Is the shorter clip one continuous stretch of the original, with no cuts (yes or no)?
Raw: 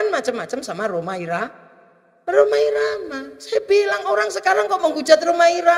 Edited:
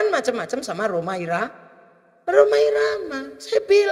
yes